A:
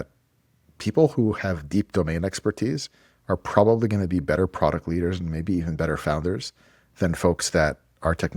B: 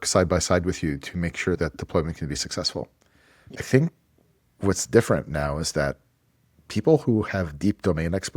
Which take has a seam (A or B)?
B